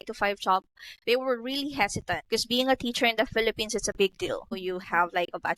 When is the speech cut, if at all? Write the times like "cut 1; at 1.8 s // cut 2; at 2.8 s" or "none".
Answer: cut 1; at 2.2 s // cut 2; at 4.6 s

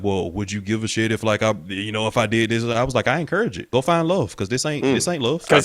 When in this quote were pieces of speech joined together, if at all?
cut 1; at 3.6 s

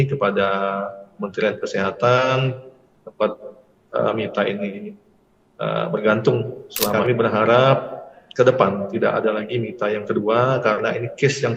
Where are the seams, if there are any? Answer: cut 1; at 7.0 s

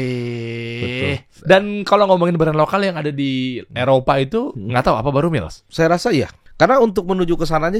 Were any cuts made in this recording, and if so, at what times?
cut 1; at 1.3 s // cut 2; at 4.6 s // cut 3; at 5.6 s // cut 4; at 6.4 s

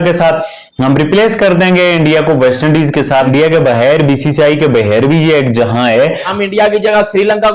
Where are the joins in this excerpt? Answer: cut 1; at 3.3 s // cut 2; at 6.2 s

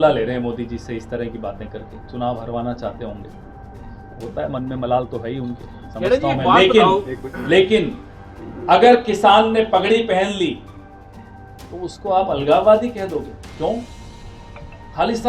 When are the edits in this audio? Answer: none

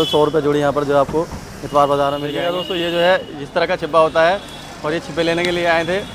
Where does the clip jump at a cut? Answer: cut 1; at 2.4 s

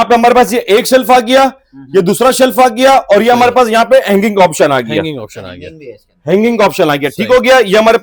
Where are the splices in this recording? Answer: none

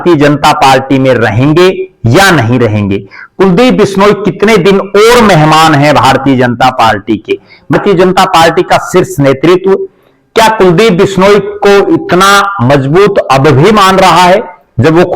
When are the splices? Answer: cut 1; at 7.7 s

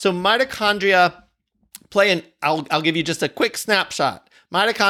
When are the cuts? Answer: none

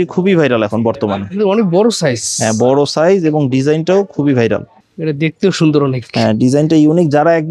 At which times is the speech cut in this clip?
cut 1; at 4.8 s

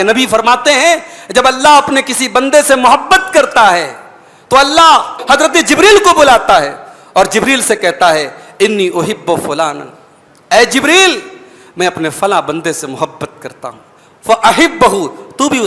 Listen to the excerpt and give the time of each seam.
cut 1; at 5.2 s

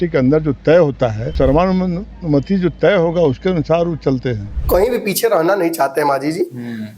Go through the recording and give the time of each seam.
cut 1; at 1.2 s // cut 2; at 4.5 s

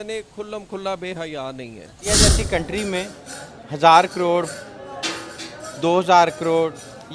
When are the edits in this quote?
cut 1; at 2.1 s

